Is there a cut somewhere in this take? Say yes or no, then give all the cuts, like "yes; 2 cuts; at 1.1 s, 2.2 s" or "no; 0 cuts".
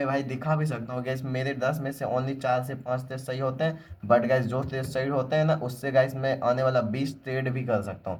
no; 0 cuts